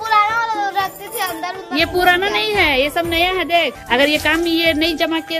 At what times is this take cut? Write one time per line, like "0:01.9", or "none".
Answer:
0:03.8

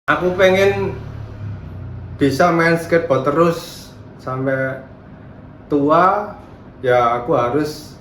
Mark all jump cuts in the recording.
none

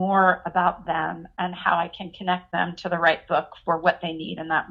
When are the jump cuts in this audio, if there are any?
none

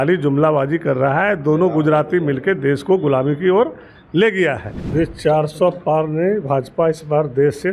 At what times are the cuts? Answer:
0:04.7

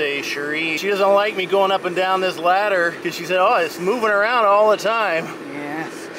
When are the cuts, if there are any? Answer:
0:00.7
0:03.0

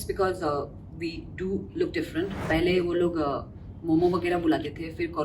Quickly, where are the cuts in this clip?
0:02.4

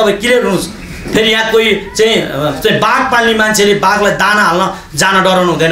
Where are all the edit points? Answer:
none

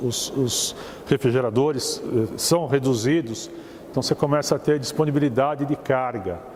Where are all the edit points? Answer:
none

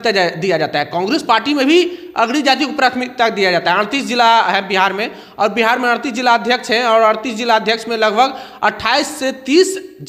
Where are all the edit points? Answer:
none

